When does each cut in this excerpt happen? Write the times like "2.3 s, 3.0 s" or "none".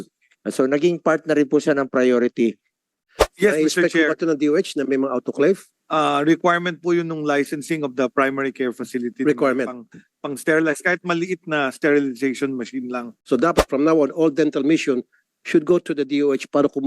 3.0 s, 13.1 s